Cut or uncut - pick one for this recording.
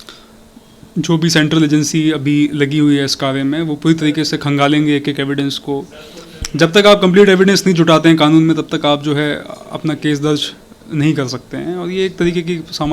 uncut